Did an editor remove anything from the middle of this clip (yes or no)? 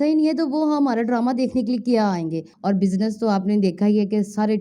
yes